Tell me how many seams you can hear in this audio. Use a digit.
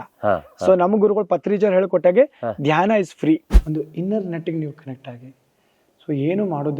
1